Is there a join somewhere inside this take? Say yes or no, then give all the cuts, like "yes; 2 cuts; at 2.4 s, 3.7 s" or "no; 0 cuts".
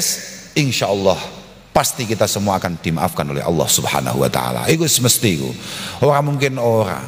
no; 0 cuts